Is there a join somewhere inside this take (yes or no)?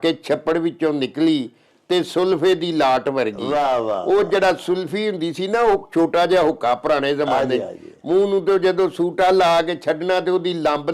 no